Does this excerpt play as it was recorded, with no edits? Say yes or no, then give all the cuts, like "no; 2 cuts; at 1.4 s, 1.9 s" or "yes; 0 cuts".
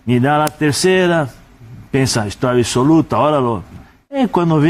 yes; 0 cuts